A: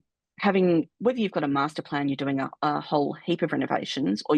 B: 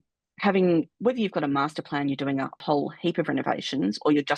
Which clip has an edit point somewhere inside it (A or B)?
B